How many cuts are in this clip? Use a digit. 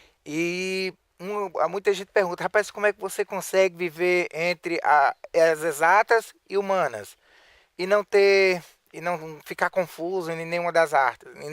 1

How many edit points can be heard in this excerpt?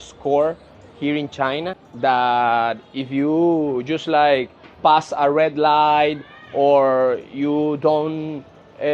1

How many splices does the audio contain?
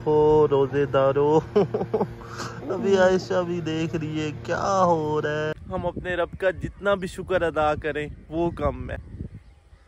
2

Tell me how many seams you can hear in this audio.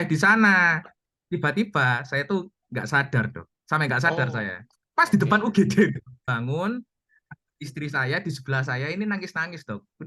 1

